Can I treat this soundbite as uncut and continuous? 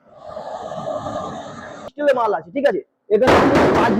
no; 1 cut; at 1.9 s

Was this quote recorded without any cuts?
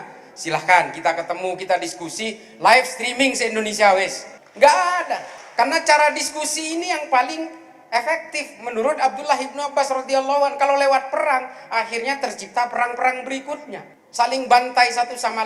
yes; 0 cuts

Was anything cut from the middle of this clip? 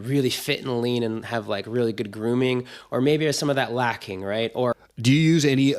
yes; 1 cut; at 4.7 s

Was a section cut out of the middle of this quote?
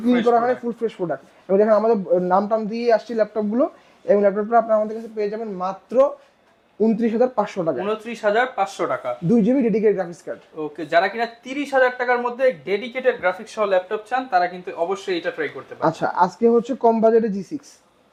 no; 0 cuts

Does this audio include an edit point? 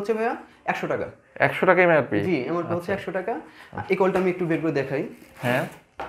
no; 0 cuts

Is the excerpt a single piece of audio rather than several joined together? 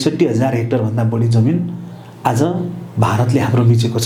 yes; 0 cuts

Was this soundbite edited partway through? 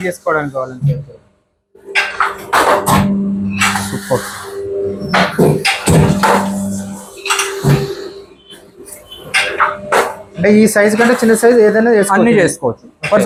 no; 0 cuts

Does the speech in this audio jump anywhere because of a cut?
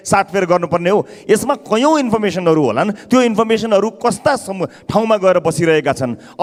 no; 0 cuts

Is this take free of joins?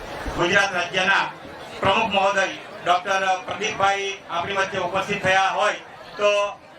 yes; 0 cuts

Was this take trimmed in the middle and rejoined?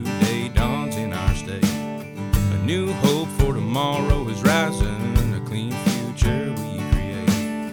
no; 0 cuts

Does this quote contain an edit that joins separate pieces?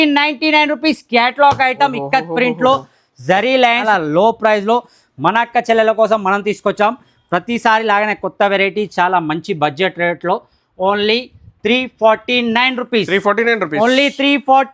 yes; 1 cut; at 3.8 s

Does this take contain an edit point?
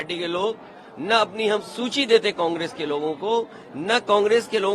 no; 0 cuts

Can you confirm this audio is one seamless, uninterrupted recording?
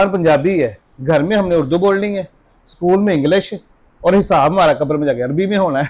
yes; 0 cuts

